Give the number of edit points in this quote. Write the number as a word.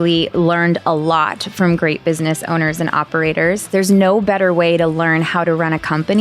one